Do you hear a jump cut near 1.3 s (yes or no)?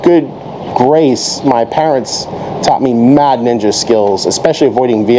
no